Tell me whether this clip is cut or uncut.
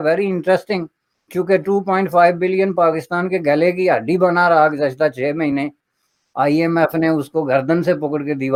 uncut